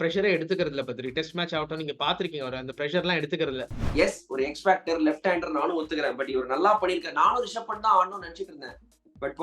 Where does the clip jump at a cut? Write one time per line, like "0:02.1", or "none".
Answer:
0:03.8